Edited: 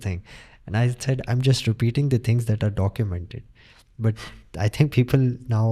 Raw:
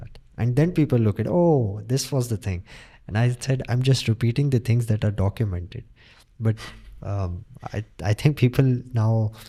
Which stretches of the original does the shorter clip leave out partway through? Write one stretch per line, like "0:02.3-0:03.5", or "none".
0:06.9-0:07.9